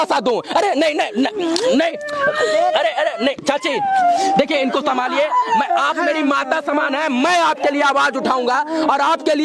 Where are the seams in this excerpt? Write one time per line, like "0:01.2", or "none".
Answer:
none